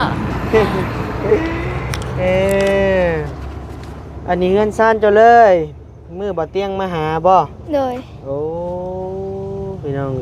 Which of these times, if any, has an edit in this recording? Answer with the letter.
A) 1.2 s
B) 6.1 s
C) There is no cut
C